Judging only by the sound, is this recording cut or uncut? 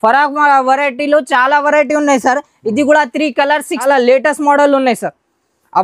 cut